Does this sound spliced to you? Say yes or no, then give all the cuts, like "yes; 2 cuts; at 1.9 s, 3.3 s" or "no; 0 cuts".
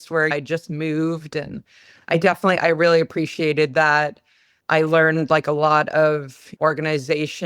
yes; 1 cut; at 6.5 s